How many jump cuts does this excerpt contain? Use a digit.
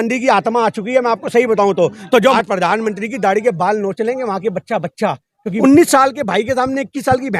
2